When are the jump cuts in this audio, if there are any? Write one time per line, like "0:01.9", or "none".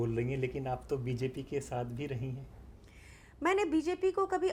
none